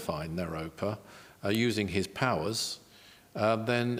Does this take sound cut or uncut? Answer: uncut